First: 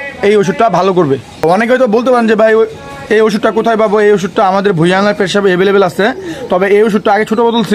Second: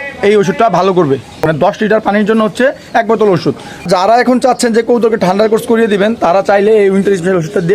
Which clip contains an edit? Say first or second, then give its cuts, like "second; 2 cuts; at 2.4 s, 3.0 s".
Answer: second; 2 cuts; at 1.5 s, 3.8 s